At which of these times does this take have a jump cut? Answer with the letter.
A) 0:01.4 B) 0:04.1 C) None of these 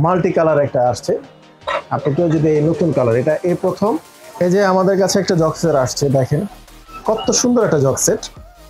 B